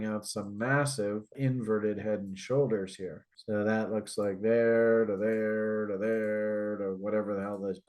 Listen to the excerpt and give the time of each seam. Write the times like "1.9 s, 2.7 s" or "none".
1.3 s